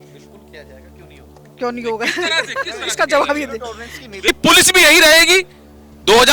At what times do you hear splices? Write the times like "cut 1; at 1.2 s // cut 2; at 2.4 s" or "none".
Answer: cut 1; at 4.2 s